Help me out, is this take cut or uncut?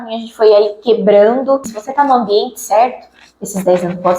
cut